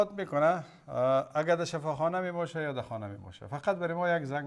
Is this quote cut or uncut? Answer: uncut